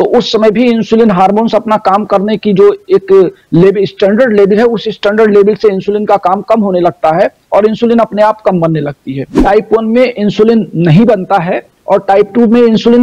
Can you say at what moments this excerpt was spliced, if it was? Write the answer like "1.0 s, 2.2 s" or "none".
9.4 s